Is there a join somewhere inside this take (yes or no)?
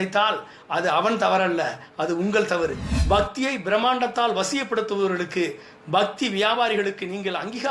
yes